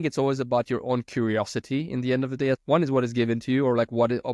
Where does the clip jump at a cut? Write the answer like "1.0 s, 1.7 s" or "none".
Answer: 2.6 s